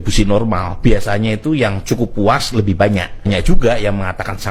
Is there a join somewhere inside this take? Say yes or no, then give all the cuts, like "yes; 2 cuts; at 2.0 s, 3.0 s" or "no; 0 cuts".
no; 0 cuts